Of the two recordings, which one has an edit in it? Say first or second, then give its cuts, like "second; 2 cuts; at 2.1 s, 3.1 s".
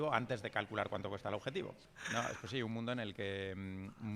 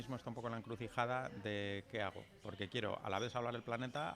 first; 1 cut; at 1.8 s